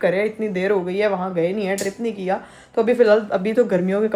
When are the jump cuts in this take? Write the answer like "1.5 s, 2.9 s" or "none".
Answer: none

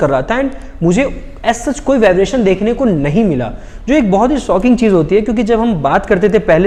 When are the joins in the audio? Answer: none

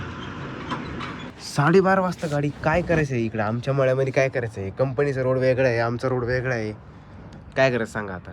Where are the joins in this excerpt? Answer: 1.3 s

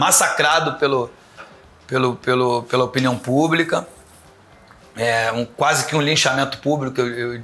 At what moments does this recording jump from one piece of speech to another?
none

